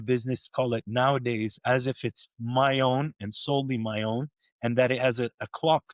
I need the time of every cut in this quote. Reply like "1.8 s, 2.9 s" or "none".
none

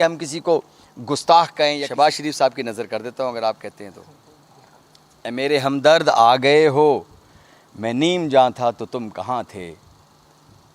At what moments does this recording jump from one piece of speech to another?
1.8 s

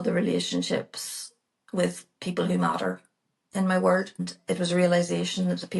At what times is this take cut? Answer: 4.3 s

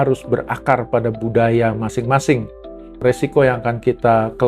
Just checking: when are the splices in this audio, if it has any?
3.0 s

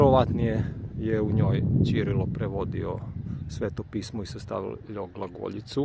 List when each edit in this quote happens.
none

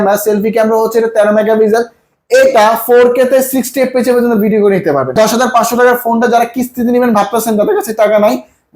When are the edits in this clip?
5.2 s

